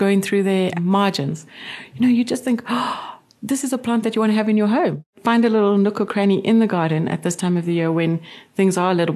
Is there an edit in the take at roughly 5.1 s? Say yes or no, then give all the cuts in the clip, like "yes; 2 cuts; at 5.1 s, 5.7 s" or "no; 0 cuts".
yes; 1 cut; at 5.1 s